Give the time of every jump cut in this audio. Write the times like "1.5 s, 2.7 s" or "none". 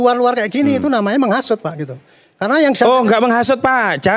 none